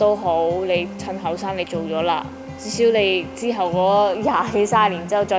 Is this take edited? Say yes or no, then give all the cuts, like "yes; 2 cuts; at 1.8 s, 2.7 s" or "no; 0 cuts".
no; 0 cuts